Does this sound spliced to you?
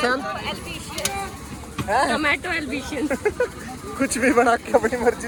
no; 0 cuts

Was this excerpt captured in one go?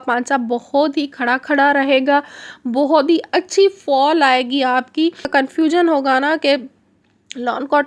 no; 1 cut; at 5.2 s

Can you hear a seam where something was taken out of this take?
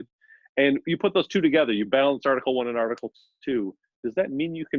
no; 0 cuts

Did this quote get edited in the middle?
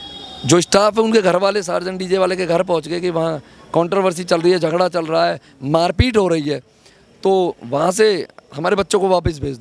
no; 0 cuts

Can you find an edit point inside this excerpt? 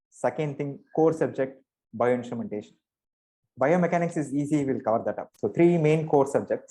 yes; 1 cut; at 5.3 s

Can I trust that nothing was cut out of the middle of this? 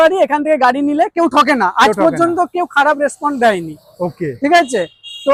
yes; 0 cuts

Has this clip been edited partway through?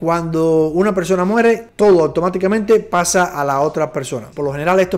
no; 0 cuts

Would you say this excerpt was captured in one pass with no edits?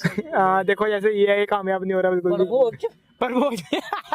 no; 1 cut; at 3.2 s

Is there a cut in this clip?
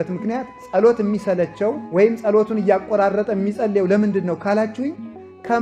no; 0 cuts

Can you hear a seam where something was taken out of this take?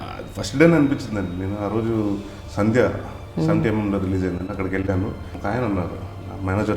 yes; 2 cuts; at 2.4 s, 5.3 s

